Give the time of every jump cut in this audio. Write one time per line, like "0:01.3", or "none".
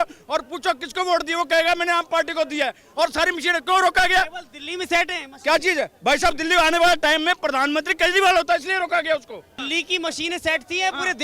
0:09.6